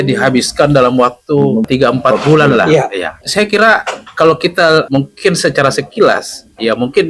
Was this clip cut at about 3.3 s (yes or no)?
no